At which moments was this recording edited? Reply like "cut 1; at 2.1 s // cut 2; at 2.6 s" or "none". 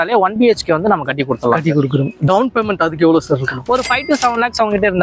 none